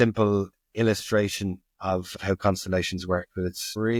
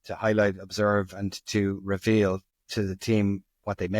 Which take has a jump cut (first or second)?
second